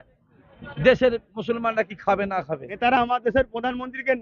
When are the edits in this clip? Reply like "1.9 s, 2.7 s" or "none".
2.8 s